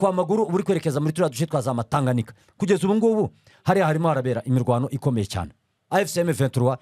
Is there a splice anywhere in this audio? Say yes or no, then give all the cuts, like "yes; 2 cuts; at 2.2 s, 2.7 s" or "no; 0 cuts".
yes; 1 cut; at 5.8 s